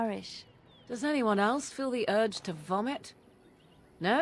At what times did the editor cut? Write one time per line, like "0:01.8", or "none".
none